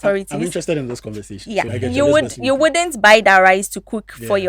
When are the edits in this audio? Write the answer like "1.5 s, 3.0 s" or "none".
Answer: 1.8 s